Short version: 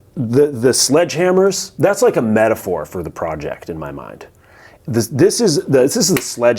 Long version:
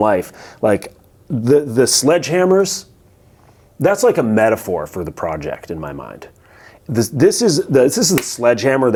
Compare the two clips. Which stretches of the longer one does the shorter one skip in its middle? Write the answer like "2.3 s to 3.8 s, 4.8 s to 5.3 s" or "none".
2.8 s to 3.7 s